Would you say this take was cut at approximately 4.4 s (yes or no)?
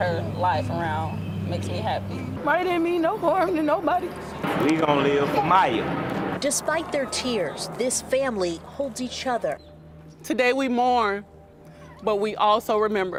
no